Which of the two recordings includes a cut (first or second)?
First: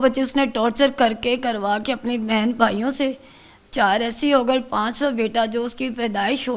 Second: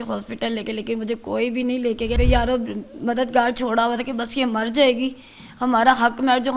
second